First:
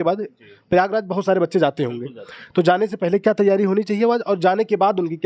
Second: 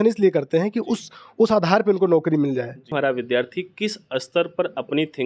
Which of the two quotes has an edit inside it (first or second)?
second